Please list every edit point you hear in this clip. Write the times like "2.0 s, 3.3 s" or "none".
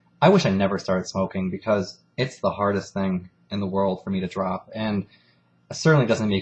none

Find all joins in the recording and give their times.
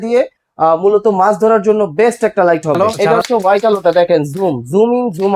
2.8 s

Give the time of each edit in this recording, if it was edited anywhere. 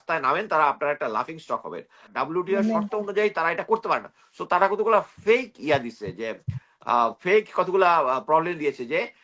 2.1 s

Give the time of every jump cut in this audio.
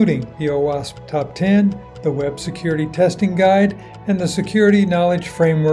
none

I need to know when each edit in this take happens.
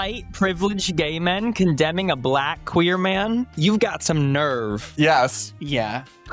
4.8 s

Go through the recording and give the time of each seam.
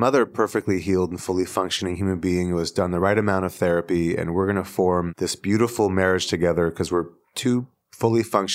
5.1 s

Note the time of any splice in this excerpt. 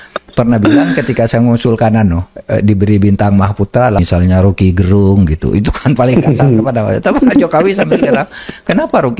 4.0 s

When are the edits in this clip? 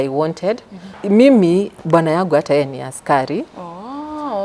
0.9 s

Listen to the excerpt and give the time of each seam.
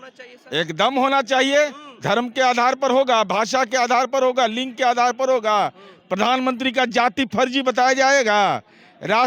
none

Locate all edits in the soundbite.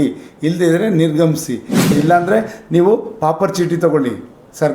1.9 s

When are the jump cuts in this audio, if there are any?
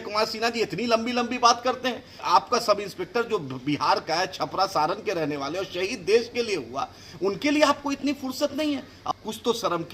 2.2 s, 9.2 s

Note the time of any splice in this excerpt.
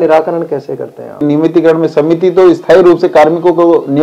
1.2 s

